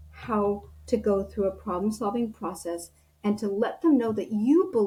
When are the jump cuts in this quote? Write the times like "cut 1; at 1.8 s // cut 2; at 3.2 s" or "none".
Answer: none

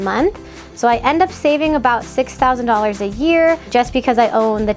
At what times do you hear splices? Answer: cut 1; at 3.7 s

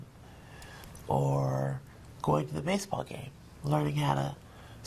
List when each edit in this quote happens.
cut 1; at 2.4 s

